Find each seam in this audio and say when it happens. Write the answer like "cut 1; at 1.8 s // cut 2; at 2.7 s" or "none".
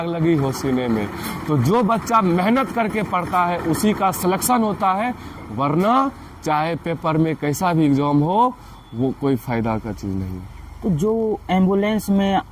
none